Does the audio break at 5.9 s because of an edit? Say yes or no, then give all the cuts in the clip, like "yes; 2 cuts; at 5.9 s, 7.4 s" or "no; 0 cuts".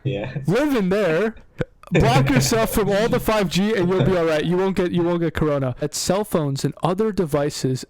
yes; 1 cut; at 5.9 s